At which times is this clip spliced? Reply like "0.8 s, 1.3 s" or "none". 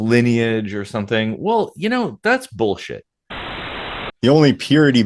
3.6 s